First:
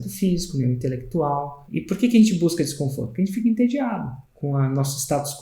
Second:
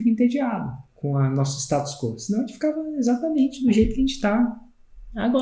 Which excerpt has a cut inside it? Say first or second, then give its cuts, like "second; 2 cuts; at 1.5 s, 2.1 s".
first; 1 cut; at 1.6 s